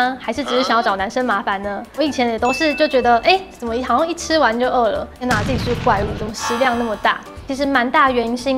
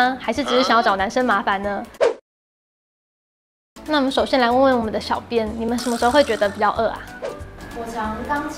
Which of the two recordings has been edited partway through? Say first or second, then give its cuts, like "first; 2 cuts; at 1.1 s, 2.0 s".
first; 3 cuts; at 1.9 s, 5.2 s, 7.4 s